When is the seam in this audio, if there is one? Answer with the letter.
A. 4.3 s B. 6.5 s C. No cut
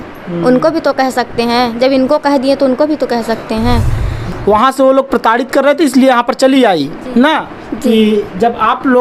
A